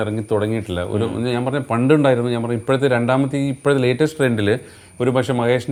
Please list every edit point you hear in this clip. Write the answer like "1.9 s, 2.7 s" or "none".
none